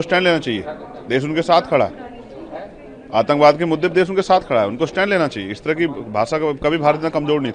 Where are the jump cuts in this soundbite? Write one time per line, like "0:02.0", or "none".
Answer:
none